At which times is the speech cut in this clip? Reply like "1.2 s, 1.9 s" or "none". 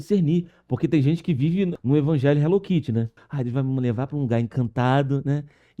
1.7 s, 3.2 s